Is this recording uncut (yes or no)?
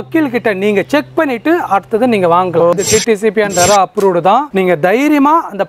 no